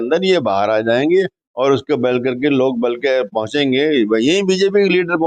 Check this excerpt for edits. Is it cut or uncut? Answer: uncut